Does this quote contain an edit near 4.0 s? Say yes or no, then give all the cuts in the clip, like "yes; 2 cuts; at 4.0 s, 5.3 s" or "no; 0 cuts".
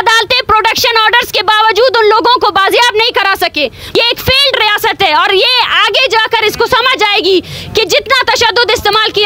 yes; 1 cut; at 4.0 s